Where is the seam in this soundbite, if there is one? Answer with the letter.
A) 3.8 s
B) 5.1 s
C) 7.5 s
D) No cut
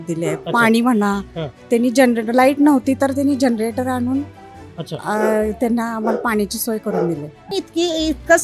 C